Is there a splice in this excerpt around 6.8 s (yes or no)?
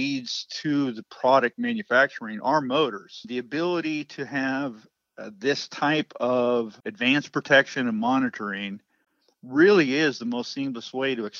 yes